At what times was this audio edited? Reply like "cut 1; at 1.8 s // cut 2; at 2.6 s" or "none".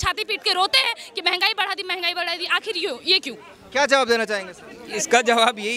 none